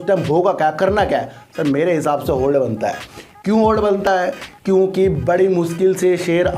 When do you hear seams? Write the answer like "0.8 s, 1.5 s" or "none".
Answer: none